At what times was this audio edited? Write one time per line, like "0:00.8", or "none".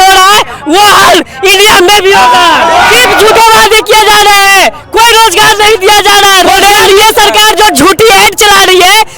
0:03.0
0:06.5